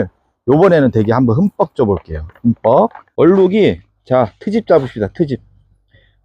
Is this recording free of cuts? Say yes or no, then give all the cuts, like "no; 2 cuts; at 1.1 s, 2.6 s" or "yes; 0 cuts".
no; 1 cut; at 3.0 s